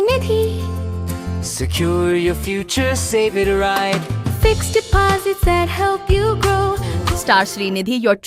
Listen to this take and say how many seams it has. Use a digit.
1